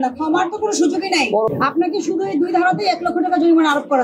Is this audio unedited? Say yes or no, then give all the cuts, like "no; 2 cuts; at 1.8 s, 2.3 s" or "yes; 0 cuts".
no; 1 cut; at 1.5 s